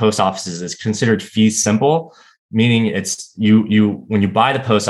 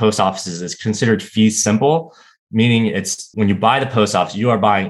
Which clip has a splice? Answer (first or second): second